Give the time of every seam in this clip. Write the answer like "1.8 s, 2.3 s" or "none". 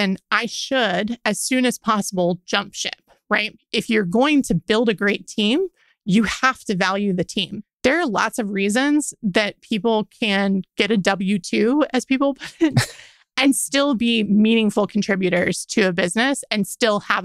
3.6 s, 7.6 s